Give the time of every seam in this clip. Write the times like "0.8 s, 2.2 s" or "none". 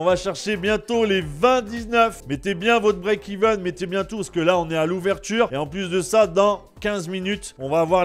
none